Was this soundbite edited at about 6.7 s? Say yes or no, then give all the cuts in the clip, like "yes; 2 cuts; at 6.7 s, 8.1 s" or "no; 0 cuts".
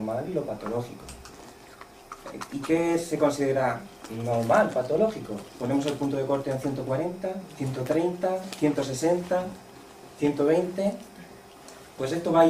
yes; 1 cut; at 6.7 s